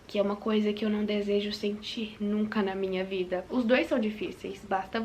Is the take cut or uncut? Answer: cut